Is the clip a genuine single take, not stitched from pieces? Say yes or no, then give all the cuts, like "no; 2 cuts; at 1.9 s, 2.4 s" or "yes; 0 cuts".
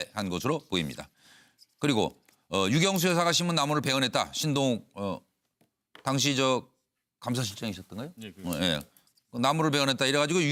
yes; 0 cuts